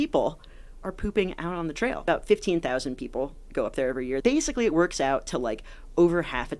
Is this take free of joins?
no; 2 cuts; at 2.0 s, 4.2 s

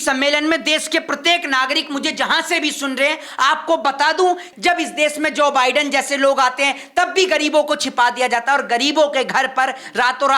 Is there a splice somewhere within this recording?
yes; 1 cut; at 4.5 s

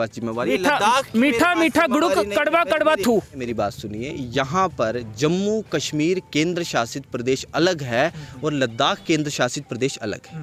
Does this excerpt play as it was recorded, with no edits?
yes; 0 cuts

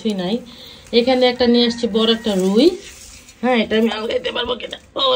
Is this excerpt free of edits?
yes; 0 cuts

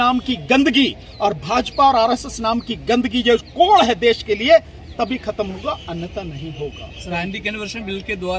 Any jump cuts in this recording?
no; 0 cuts

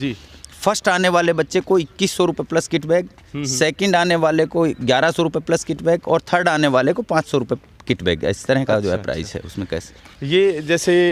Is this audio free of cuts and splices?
yes; 0 cuts

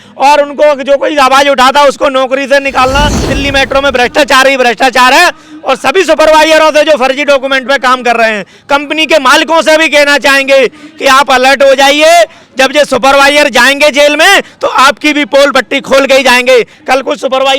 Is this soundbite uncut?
no; 1 cut; at 3.3 s

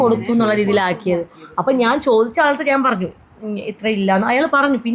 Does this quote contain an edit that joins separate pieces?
yes; 1 cut; at 1.0 s

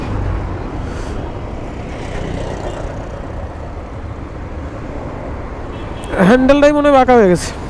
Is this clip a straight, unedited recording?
yes; 0 cuts

